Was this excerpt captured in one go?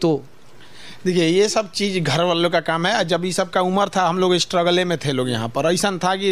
yes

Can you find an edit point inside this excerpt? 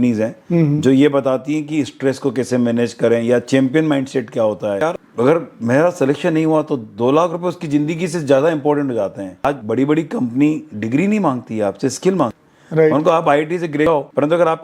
yes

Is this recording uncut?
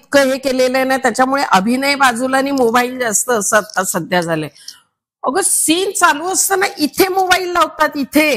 yes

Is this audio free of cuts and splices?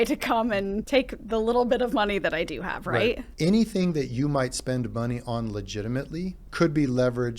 no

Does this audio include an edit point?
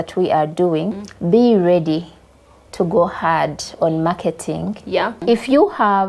yes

